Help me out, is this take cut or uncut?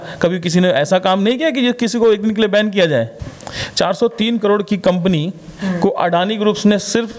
cut